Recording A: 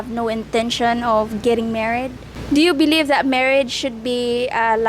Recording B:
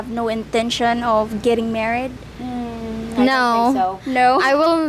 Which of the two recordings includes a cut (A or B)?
A